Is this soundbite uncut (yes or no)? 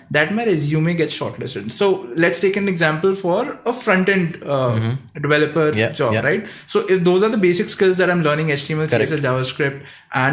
yes